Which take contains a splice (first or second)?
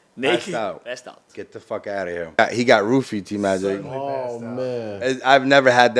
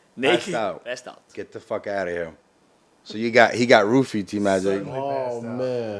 first